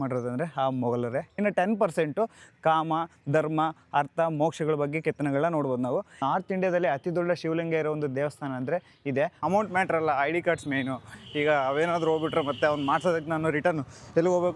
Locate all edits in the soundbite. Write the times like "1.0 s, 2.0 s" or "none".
1.4 s, 6.1 s, 9.4 s